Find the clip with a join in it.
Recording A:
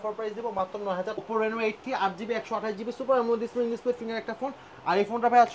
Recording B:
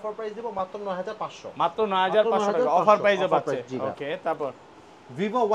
A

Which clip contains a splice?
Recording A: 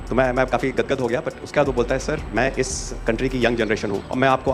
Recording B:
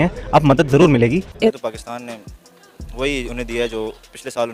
B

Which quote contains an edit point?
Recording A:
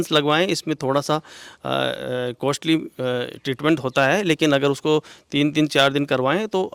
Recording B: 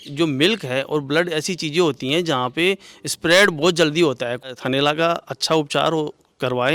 B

